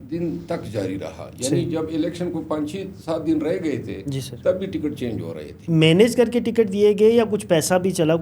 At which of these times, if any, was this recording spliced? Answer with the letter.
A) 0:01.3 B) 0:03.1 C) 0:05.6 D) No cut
C